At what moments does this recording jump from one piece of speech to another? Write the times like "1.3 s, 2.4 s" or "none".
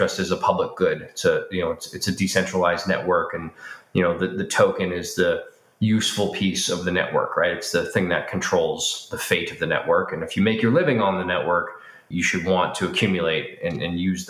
12.1 s